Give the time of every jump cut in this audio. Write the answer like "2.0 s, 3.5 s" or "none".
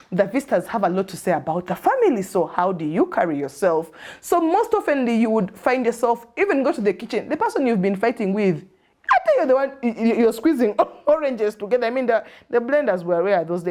none

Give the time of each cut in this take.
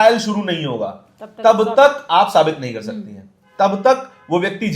none

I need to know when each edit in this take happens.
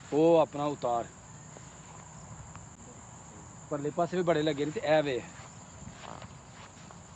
none

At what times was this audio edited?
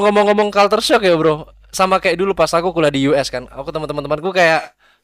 none

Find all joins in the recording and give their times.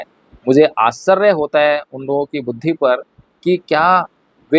none

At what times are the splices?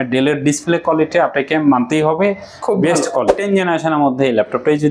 3.3 s

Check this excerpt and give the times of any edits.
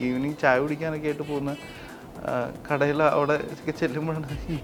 none

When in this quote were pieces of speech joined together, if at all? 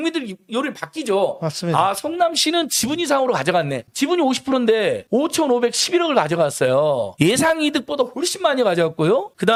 none

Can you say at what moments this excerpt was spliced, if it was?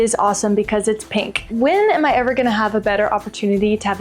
1.5 s

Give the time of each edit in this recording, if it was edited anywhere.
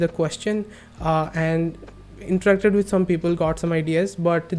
none

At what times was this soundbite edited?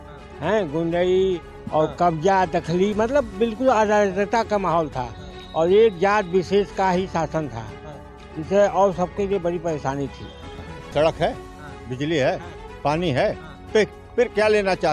10.6 s

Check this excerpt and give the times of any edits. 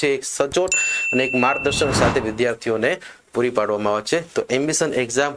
none

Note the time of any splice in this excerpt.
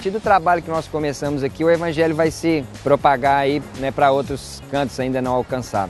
2.7 s, 3.7 s

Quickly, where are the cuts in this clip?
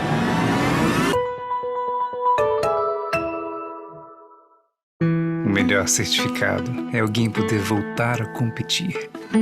5.0 s

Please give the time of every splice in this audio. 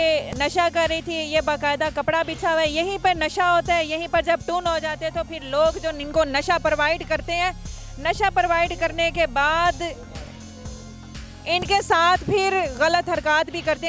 none

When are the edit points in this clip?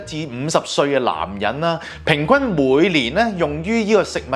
none

